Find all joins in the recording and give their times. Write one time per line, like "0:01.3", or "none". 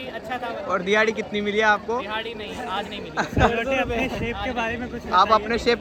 none